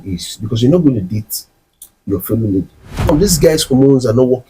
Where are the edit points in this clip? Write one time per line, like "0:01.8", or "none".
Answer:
0:03.1